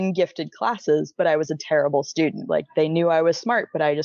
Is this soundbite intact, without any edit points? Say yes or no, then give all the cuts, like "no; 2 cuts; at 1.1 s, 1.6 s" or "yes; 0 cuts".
no; 1 cut; at 2.4 s